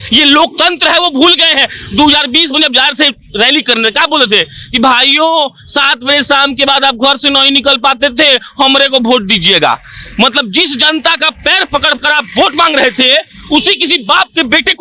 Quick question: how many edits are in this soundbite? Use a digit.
0